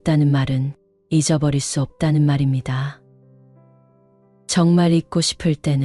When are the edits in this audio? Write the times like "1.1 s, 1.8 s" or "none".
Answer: 3.0 s, 4.4 s